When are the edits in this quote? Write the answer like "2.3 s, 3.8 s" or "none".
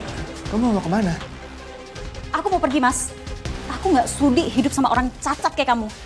none

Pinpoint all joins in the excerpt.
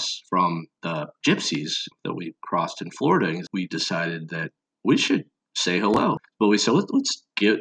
3.5 s, 6.3 s

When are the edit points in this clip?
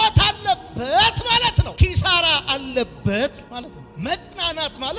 none

